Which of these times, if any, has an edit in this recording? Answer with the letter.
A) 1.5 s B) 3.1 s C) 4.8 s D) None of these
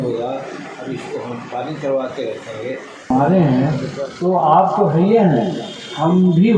B